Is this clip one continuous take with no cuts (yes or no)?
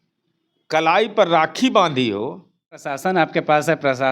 no